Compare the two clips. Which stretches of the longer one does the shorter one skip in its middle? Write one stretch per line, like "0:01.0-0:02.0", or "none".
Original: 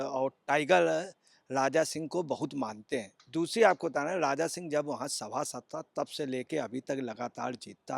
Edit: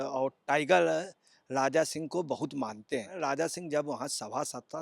0:03.2-0:04.2